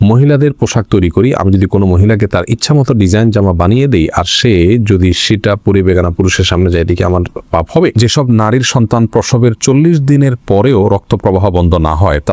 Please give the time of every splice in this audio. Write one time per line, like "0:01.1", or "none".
0:08.0